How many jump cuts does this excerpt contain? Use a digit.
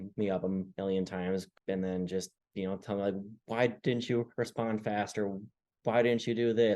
2